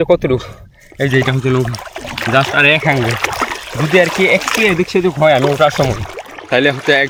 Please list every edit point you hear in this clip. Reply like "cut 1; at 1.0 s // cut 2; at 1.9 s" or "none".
none